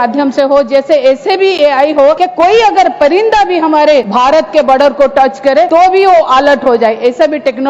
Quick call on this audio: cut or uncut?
cut